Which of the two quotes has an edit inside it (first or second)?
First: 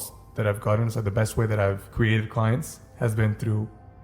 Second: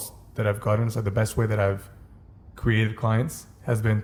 first